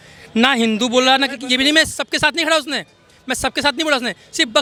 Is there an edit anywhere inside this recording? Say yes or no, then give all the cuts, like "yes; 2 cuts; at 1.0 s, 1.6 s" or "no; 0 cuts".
no; 0 cuts